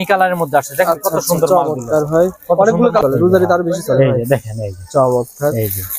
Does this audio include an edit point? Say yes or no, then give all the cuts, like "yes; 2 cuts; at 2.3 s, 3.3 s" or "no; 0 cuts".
yes; 1 cut; at 3.0 s